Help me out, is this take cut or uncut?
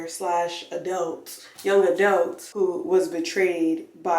cut